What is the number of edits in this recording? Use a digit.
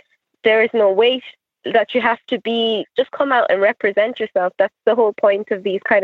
1